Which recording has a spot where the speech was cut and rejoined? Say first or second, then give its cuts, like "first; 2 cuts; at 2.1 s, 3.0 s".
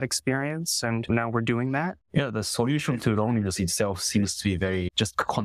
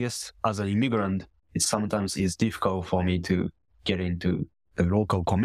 first; 1 cut; at 1.9 s